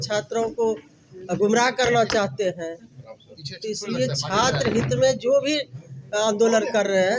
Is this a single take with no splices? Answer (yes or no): yes